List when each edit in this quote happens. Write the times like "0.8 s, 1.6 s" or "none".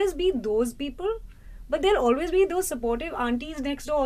none